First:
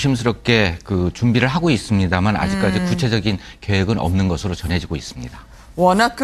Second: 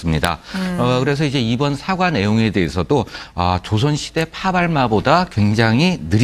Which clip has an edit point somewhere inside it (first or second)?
first